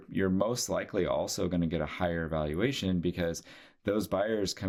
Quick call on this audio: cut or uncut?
uncut